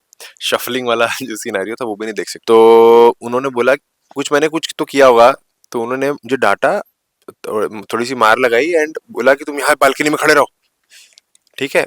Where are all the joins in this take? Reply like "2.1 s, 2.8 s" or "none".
2.3 s